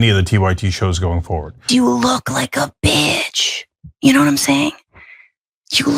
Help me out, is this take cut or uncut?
cut